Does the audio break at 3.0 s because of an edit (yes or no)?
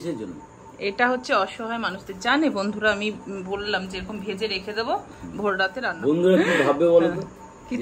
no